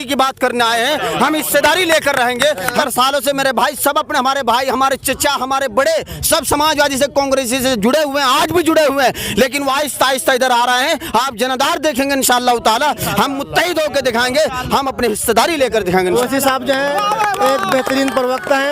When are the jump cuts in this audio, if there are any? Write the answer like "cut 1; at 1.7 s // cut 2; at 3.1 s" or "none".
cut 1; at 2.7 s // cut 2; at 16.1 s